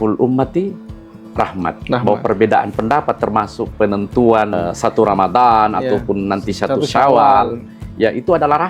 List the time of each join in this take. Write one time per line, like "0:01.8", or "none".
0:04.6